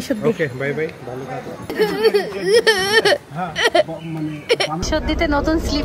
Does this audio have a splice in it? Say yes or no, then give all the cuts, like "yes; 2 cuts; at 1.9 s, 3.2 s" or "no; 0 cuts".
yes; 2 cuts; at 1.7 s, 4.8 s